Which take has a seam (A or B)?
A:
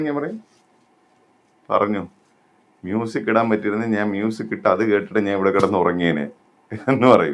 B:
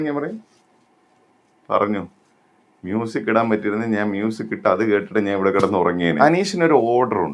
B